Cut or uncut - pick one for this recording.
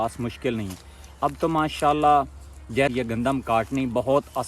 cut